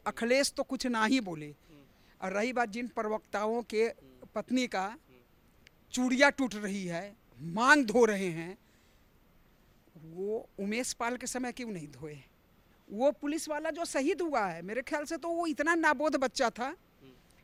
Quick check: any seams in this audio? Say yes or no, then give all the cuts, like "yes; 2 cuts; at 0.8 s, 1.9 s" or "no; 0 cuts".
no; 0 cuts